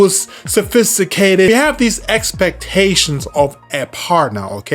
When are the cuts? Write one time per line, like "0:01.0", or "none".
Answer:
0:01.5